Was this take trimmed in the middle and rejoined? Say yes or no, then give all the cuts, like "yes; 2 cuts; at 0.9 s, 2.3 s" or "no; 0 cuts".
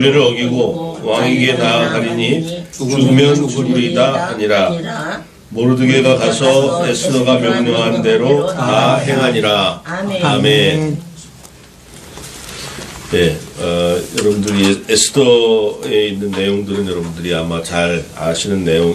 yes; 1 cut; at 7.5 s